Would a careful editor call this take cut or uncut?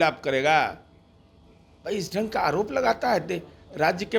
uncut